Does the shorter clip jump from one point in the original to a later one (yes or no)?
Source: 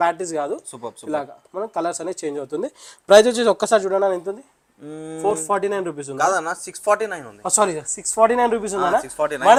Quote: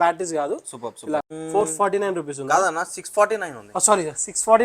yes